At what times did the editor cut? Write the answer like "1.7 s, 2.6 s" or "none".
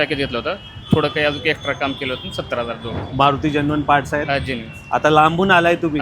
3.0 s